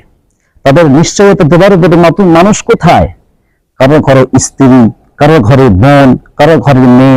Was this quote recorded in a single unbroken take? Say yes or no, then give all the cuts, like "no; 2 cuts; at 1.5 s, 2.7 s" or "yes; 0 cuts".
yes; 0 cuts